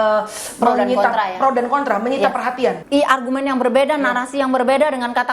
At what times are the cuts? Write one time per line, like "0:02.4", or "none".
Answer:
0:02.8